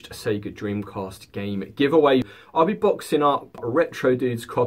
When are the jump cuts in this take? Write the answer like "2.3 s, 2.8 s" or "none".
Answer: 2.2 s, 3.6 s